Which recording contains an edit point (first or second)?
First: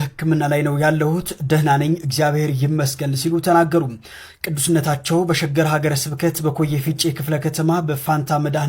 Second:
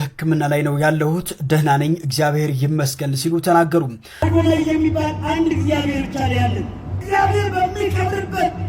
second